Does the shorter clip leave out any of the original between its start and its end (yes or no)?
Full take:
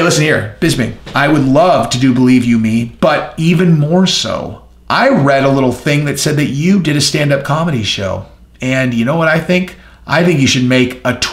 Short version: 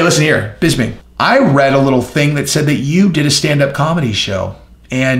yes